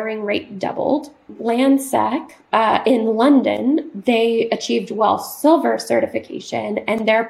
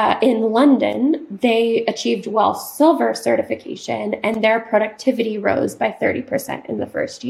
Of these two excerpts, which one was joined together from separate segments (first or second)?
first